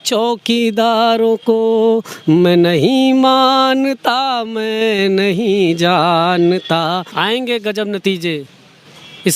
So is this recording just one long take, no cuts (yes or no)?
no